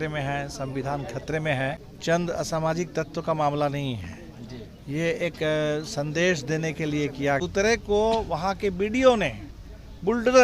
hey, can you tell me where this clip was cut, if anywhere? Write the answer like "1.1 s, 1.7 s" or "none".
1.9 s, 7.4 s